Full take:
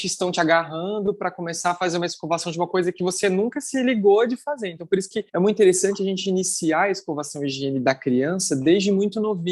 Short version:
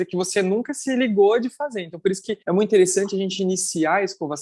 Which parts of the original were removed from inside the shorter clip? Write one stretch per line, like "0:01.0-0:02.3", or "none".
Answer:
none